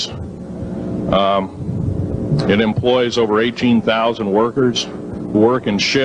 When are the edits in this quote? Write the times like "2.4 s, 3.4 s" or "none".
3.5 s